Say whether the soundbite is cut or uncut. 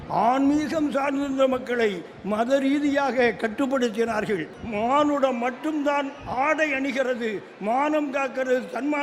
cut